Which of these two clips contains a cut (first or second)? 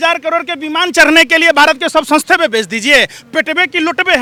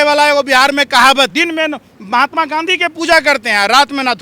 second